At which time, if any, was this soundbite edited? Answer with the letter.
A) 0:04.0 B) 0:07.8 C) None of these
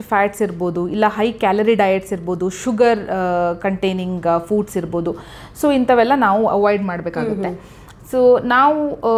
C